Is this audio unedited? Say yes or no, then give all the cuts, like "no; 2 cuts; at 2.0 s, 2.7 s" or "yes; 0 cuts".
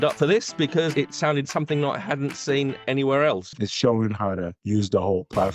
no; 1 cut; at 3.5 s